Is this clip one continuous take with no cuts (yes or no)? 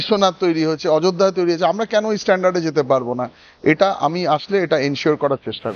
yes